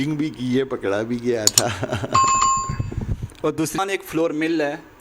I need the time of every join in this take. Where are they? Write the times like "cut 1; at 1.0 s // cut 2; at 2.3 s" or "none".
cut 1; at 3.8 s